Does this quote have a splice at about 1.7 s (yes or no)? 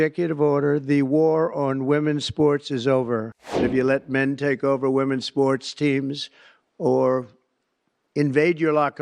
no